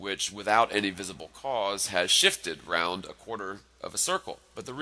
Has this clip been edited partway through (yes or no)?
yes